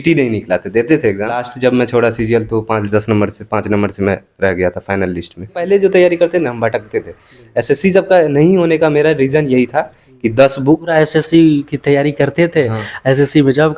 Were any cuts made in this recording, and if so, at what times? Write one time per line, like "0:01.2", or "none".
0:01.4
0:05.6
0:10.9